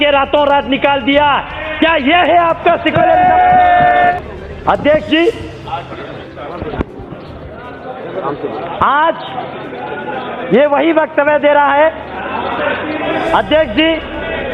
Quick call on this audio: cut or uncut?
uncut